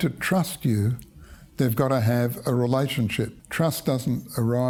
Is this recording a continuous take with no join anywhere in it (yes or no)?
yes